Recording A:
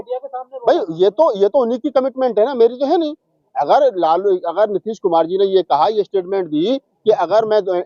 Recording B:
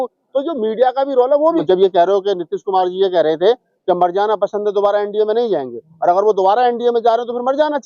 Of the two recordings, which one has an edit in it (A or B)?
B